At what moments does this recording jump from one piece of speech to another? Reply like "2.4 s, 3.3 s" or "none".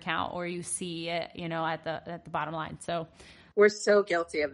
3.6 s